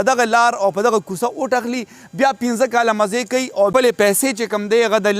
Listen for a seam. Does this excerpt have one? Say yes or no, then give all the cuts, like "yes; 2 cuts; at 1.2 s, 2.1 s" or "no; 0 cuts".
yes; 1 cut; at 3.7 s